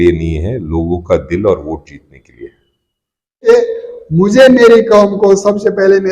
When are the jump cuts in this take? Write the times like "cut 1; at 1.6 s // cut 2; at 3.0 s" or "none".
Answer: cut 1; at 3.5 s